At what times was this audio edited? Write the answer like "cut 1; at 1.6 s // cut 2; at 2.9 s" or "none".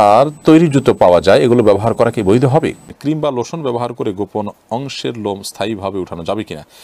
cut 1; at 2.8 s